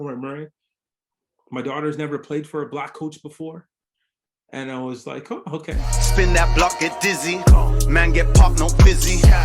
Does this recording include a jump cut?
yes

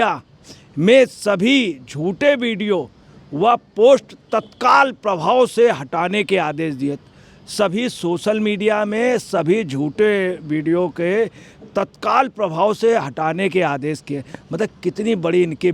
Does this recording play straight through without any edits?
yes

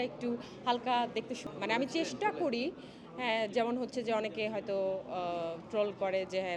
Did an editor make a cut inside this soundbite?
yes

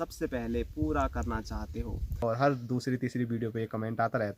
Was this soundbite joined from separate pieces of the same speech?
yes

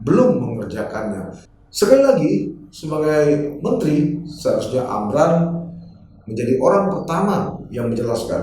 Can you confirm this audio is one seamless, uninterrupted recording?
no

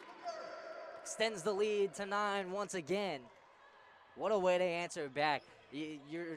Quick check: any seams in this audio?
no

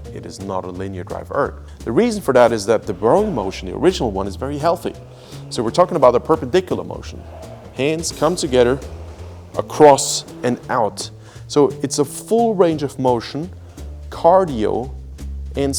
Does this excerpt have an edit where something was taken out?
yes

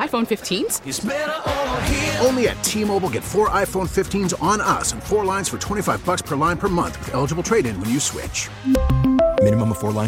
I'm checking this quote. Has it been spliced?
no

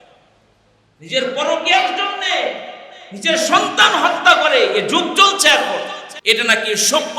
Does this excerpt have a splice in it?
yes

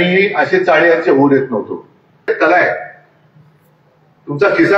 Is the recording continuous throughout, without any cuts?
no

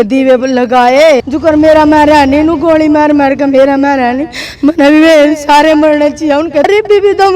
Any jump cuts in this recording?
yes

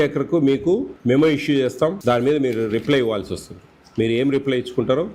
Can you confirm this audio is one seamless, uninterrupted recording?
no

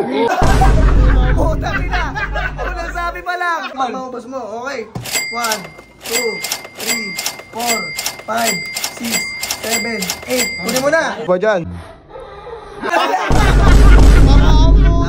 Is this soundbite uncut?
no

